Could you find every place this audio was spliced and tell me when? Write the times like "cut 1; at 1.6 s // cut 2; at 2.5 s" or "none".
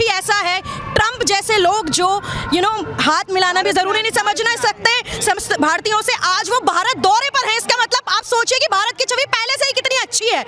none